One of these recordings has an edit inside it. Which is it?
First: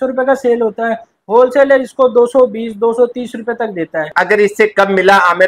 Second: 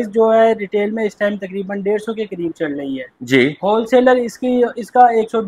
first; 1 cut; at 4.1 s

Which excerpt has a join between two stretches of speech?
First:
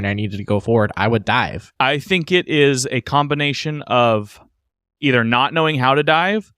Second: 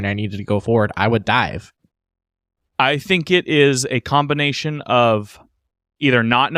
first; 1 cut; at 1.6 s

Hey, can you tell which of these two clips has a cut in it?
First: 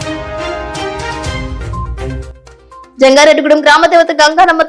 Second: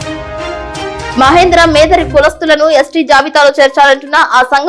first; 1 cut; at 1.1 s

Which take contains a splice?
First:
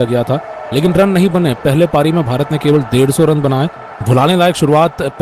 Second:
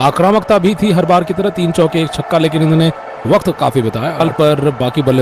second; 1 cut; at 4.2 s

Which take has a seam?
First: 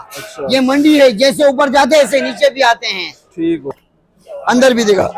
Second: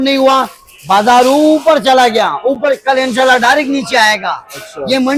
first; 1 cut; at 3.7 s

